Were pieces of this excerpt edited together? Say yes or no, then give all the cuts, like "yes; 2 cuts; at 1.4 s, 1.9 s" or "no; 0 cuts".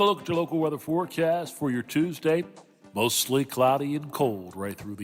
no; 0 cuts